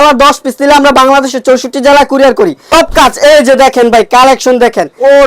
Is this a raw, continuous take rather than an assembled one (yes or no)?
no